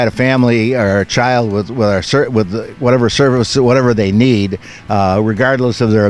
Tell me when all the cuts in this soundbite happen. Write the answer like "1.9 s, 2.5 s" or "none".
none